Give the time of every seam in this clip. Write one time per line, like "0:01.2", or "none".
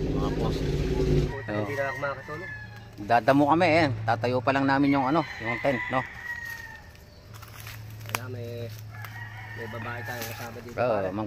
0:01.3